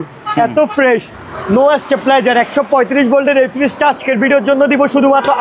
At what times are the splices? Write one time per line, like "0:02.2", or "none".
none